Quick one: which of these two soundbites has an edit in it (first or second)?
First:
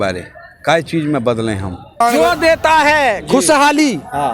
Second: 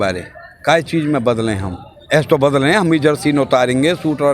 first